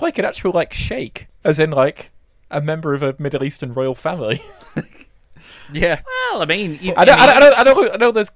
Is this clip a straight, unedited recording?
no; 1 cut; at 1.2 s

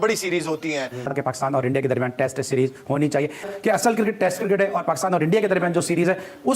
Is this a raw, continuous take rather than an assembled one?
no; 1 cut; at 1.0 s

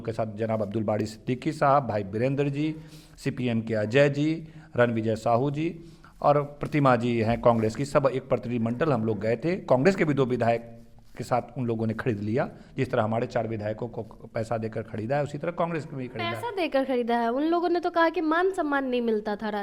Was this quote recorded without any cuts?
yes; 0 cuts

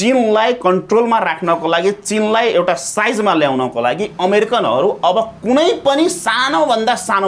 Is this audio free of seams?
yes; 0 cuts

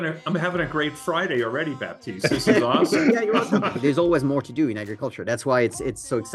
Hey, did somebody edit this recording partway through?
yes; 1 cut; at 3.7 s

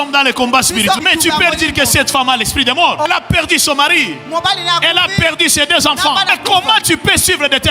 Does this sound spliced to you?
yes; 3 cuts; at 1.0 s, 3.1 s, 6.3 s

